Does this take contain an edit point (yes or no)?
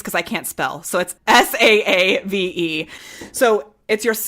yes